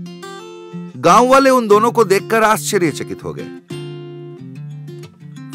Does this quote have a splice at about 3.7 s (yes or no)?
no